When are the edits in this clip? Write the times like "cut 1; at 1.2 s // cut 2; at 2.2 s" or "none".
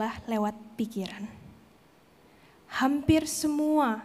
none